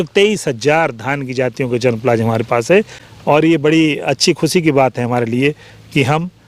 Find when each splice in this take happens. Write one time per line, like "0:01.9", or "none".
0:03.0

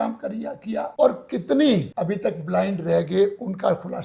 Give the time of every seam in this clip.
0:00.9
0:01.9

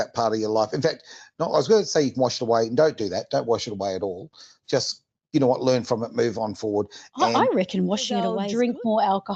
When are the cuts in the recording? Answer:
0:08.4

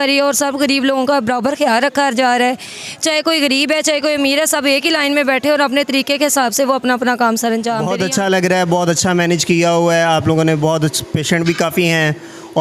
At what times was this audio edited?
0:07.9

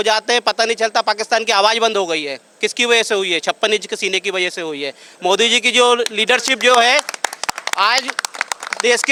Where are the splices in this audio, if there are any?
none

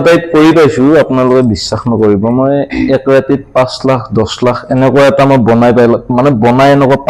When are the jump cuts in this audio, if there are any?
none

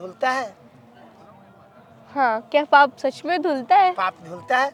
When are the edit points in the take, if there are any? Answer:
none

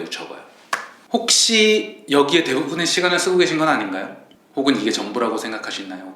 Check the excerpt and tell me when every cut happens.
0:00.9

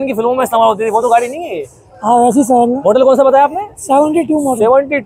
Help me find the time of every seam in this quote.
none

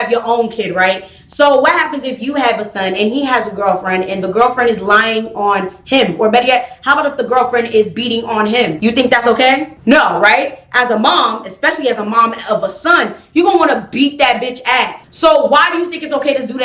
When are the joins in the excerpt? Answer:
none

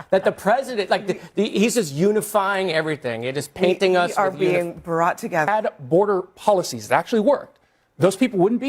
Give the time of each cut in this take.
0:05.5

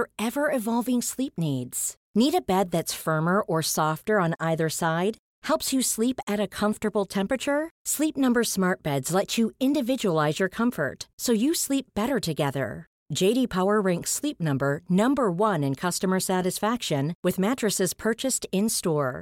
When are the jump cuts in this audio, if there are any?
none

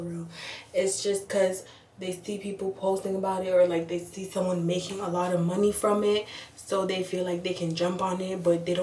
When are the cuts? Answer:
none

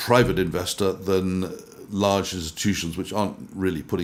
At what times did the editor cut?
none

